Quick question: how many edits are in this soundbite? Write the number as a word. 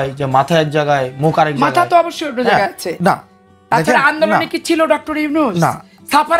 zero